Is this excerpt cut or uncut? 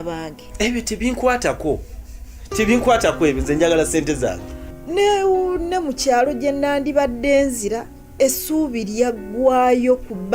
uncut